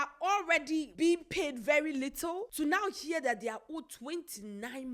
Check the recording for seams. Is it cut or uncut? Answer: cut